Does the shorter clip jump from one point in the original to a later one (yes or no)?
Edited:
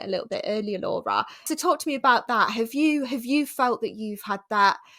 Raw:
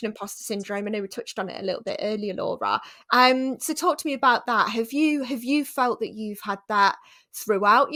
yes